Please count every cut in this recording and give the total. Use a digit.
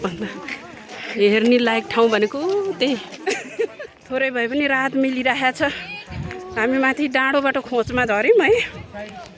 1